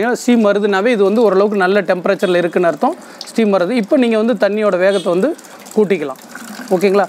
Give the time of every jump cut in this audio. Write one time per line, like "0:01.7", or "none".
none